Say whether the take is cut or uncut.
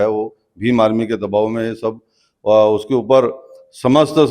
uncut